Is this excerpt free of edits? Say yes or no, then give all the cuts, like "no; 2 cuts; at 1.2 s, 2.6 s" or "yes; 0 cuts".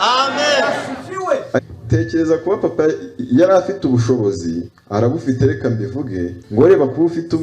no; 3 cuts; at 1.6 s, 4.7 s, 6.4 s